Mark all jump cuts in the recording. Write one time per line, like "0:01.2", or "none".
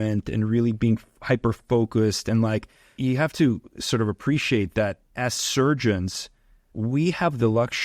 0:03.0
0:06.7

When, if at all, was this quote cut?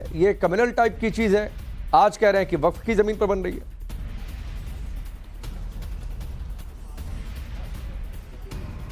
0:05.6

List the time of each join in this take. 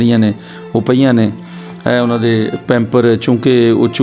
none

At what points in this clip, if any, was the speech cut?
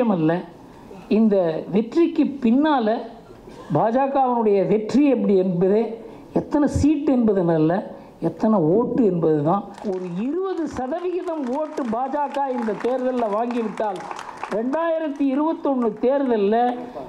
0:09.8

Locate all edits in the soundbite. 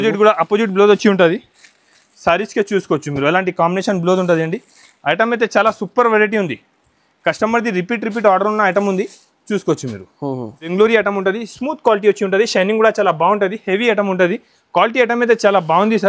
0:10.7

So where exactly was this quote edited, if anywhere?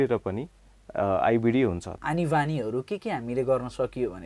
0:01.9

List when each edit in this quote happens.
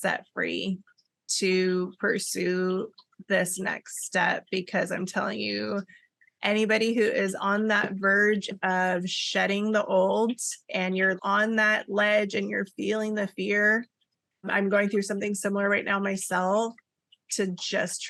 none

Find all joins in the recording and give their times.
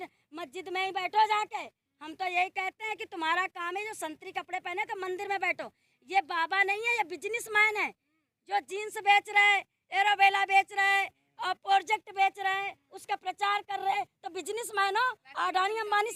none

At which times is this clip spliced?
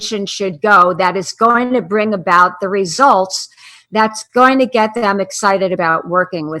none

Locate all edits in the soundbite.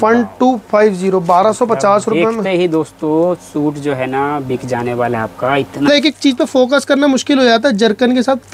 0:05.9

